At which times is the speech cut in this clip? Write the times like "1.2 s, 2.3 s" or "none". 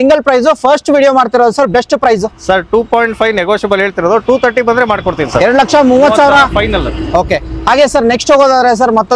none